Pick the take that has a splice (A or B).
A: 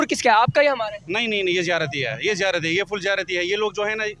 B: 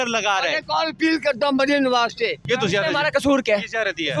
B